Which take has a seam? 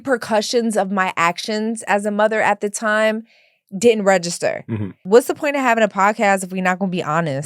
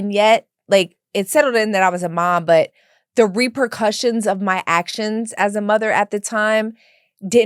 first; 1 cut; at 5.0 s

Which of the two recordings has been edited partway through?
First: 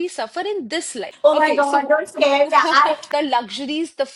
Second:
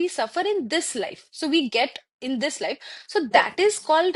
first; 2 cuts; at 1.0 s, 3.0 s

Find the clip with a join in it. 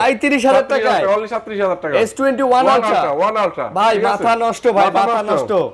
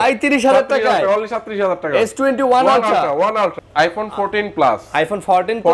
second; 1 cut; at 3.6 s

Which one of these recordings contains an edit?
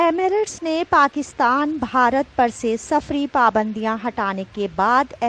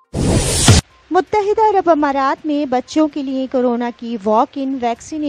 second; 1 cut; at 0.9 s

